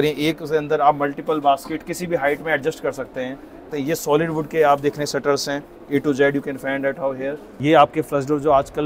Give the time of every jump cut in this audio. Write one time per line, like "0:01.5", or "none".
0:03.6
0:07.5